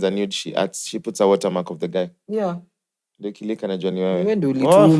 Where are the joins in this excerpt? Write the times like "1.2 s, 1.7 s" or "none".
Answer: none